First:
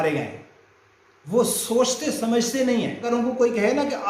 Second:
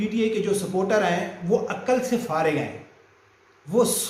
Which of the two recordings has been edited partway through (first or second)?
first